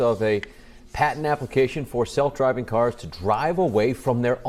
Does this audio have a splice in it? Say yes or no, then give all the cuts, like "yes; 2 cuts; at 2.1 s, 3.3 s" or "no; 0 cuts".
no; 0 cuts